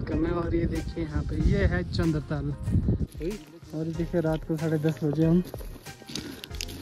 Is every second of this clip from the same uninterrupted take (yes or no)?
no